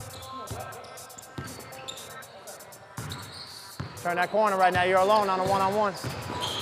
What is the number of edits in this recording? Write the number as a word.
zero